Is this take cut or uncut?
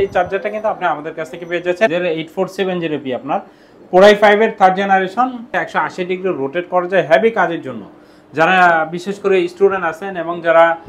cut